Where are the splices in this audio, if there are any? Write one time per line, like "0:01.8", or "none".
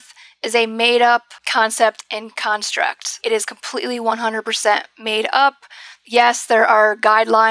0:01.4